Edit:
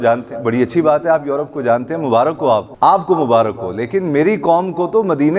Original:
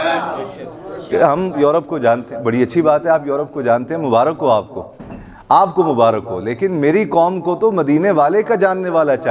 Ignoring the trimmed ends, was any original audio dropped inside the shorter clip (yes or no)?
yes